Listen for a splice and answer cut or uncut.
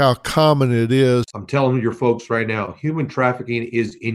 cut